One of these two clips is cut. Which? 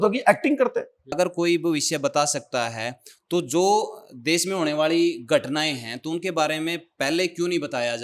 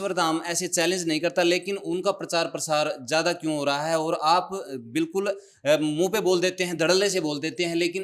first; 1 cut; at 1.1 s

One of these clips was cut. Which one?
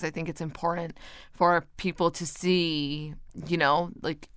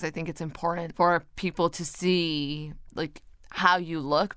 second; 2 cuts; at 0.9 s, 2.9 s

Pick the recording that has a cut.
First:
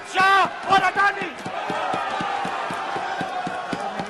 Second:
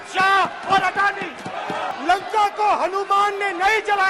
second; 1 cut; at 1.9 s

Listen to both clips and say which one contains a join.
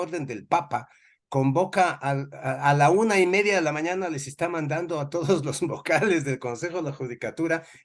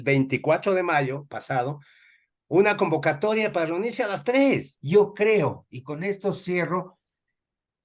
second; 1 cut; at 4.7 s

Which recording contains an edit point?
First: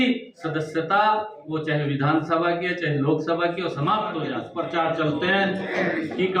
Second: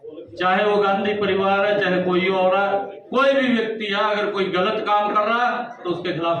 first; 1 cut; at 4.4 s

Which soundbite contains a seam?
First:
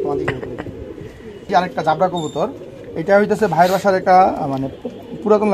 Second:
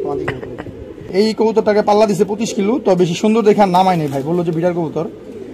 second; 1 cut; at 1.1 s

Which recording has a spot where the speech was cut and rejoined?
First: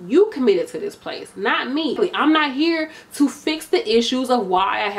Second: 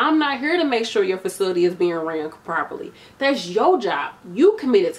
first; 1 cut; at 2.0 s

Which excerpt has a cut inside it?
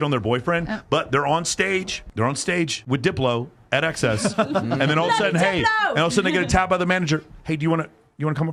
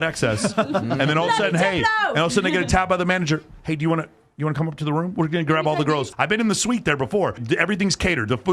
second; 2 cuts; at 6.1 s, 7.4 s

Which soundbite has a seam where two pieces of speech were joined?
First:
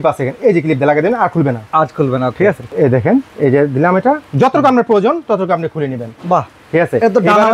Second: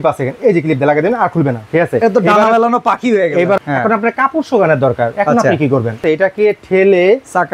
second; 3 cuts; at 1.6 s, 3.6 s, 6.0 s

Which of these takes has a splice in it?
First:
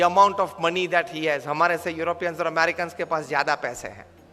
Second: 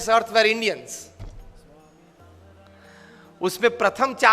second; 1 cut; at 2.7 s

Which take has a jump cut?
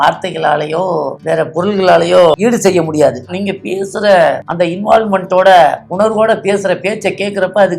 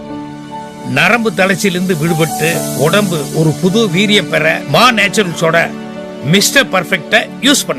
first; 5 cuts; at 1.2 s, 2.4 s, 3.3 s, 4.4 s, 5.8 s

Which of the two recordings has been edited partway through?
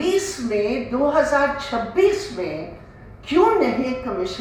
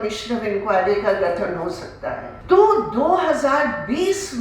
second; 1 cut; at 2.3 s

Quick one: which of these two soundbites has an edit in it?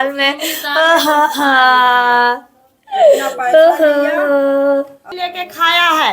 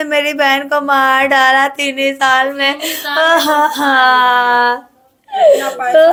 first; 1 cut; at 5.1 s

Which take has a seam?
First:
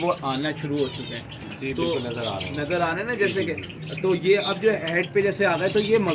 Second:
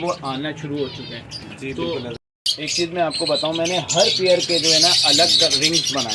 second; 1 cut; at 2.2 s

